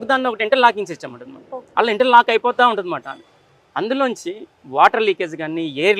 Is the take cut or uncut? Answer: uncut